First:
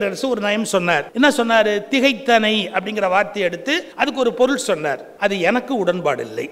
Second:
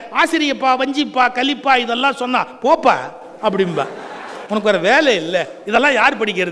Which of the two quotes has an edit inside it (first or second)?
first